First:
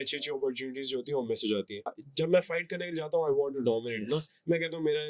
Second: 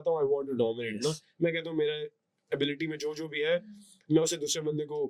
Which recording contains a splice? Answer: first; 1 cut; at 2.0 s

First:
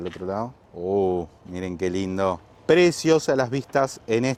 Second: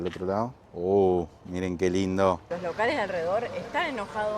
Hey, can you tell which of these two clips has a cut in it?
second; 1 cut; at 2.5 s

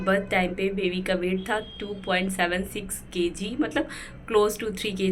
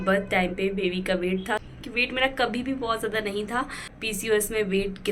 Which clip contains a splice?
second; 2 cuts; at 1.7 s, 3.8 s

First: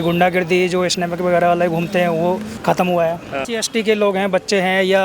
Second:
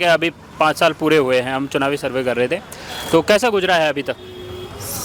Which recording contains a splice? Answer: first; 2 cuts; at 2.5 s, 3.4 s

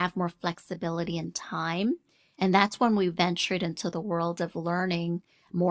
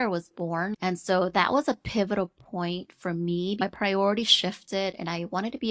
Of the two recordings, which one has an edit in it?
second; 2 cuts; at 0.7 s, 3.6 s

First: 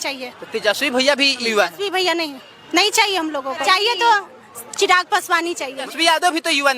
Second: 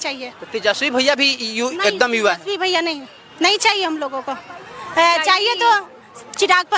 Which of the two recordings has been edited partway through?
first; 3 cuts; at 1.5 s, 3.6 s, 5.9 s

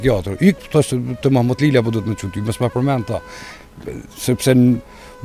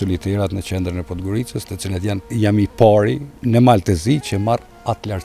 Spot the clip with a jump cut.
second; 2 cuts; at 2.2 s, 3.3 s

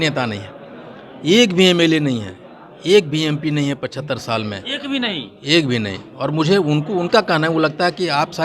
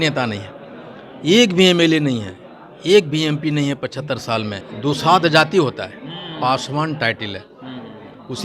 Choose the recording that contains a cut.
second; 1 cut; at 4.7 s

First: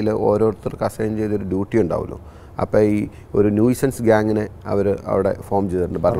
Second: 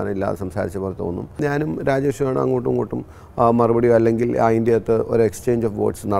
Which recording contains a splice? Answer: second; 1 cut; at 1.3 s

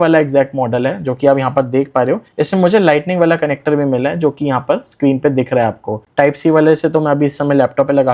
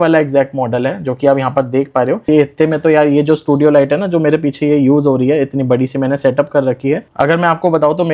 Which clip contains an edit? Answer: second; 2 cuts; at 2.2 s, 7.1 s

